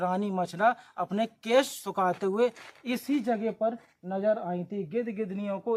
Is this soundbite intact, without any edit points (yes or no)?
yes